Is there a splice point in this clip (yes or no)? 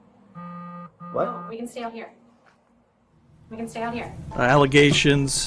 yes